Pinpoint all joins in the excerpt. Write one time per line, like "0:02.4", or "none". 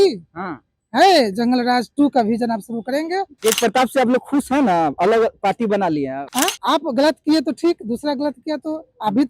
0:03.3
0:06.2